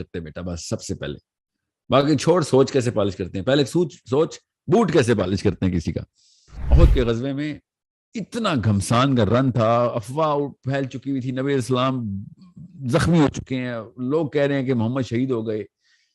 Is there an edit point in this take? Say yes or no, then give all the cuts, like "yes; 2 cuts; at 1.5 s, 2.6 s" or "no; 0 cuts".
yes; 1 cut; at 6.6 s